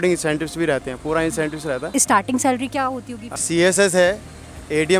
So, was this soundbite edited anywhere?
yes; 2 cuts; at 1.9 s, 3.3 s

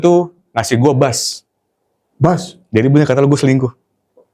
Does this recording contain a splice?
no; 0 cuts

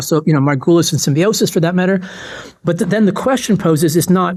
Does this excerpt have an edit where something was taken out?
no; 0 cuts

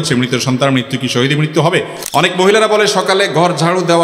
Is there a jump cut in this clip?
yes; 1 cut; at 2.0 s

